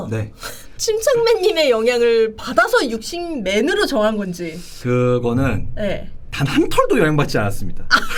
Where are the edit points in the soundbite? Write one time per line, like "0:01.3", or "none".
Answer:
none